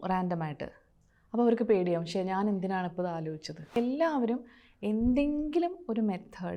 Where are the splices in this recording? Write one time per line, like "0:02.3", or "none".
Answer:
0:03.8